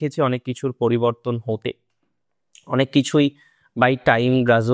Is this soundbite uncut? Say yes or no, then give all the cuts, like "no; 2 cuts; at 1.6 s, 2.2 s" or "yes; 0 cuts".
yes; 0 cuts